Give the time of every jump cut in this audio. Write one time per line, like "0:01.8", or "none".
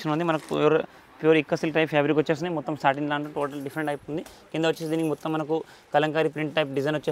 none